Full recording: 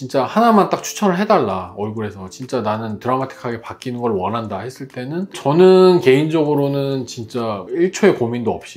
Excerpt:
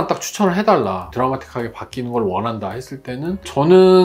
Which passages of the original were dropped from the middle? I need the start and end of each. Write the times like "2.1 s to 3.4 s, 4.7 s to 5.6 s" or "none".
1.7 s to 3.0 s